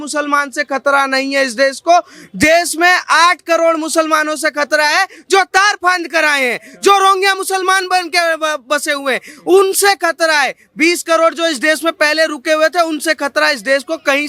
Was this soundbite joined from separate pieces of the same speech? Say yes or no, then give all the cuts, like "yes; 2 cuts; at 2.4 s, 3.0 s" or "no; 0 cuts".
no; 0 cuts